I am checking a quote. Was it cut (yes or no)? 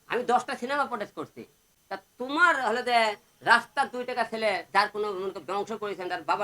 no